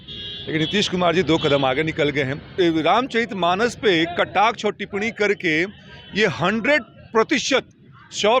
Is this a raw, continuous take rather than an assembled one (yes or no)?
no